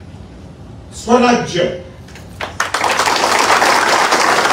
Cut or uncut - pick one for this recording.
uncut